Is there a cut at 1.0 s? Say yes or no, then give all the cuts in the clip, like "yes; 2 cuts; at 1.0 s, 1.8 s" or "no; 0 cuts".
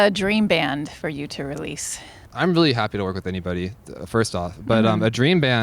no; 1 cut; at 2.2 s